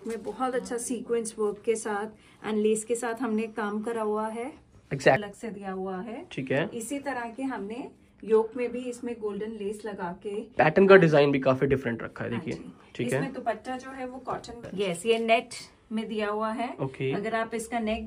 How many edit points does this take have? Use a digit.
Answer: 2